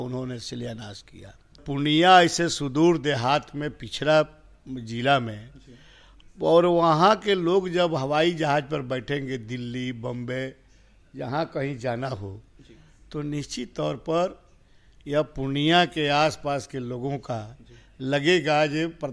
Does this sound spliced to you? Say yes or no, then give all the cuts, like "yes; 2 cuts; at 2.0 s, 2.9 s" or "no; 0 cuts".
yes; 1 cut; at 1.6 s